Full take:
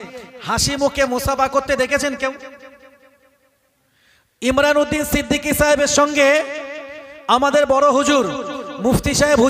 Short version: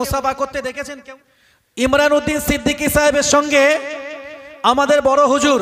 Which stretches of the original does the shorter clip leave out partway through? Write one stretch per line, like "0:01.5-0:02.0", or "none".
0:02.2-0:03.7